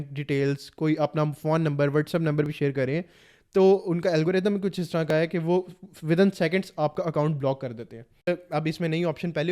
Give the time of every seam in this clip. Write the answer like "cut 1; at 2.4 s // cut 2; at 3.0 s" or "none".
cut 1; at 8.3 s